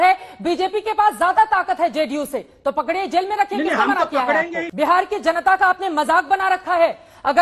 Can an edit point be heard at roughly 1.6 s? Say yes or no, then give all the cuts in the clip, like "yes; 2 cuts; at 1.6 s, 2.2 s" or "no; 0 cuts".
no; 1 cut; at 4.6 s